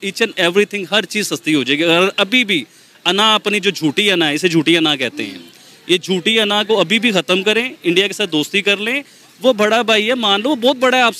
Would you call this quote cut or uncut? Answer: uncut